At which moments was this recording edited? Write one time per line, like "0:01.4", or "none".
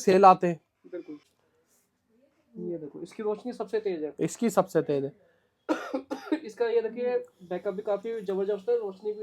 0:01.3